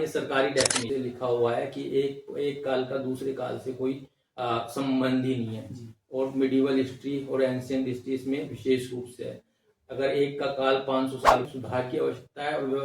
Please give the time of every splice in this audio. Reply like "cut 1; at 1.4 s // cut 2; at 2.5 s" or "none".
cut 1; at 0.8 s // cut 2; at 11.4 s